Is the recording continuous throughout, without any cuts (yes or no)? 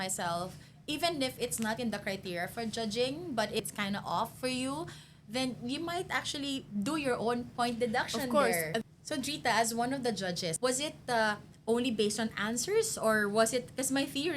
no